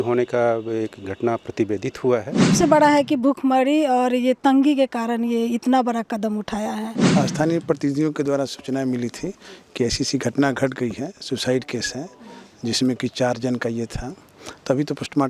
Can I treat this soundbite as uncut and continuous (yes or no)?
no